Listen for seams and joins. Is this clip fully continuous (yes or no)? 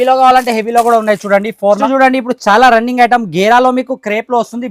no